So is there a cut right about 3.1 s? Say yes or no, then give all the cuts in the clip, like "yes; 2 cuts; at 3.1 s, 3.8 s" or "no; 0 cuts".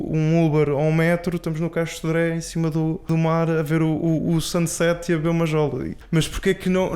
yes; 2 cuts; at 3.1 s, 5.9 s